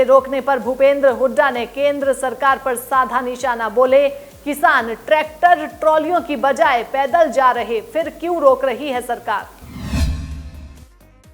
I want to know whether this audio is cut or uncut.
cut